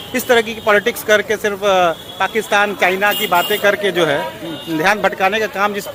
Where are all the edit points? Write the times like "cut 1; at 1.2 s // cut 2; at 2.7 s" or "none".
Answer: none